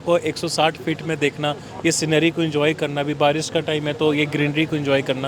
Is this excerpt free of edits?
yes; 0 cuts

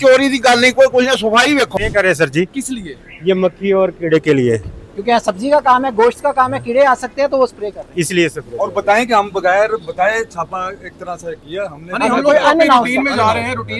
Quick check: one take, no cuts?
no; 1 cut; at 1.7 s

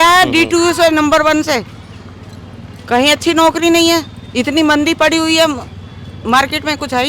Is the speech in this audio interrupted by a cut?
no; 0 cuts

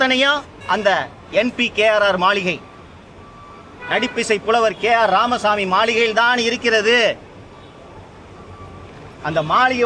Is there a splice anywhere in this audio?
no; 0 cuts

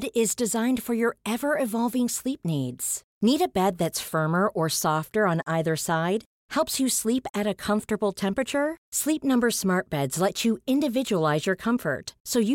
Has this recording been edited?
no; 0 cuts

